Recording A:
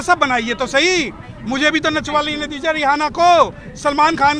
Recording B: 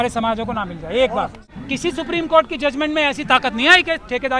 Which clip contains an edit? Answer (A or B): B